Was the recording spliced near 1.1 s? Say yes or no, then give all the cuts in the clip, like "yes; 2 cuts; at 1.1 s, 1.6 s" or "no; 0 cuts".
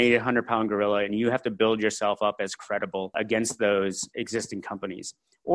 no; 2 cuts; at 3.1 s, 4.0 s